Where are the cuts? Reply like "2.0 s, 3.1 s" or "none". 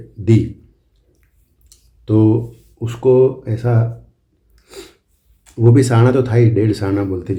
none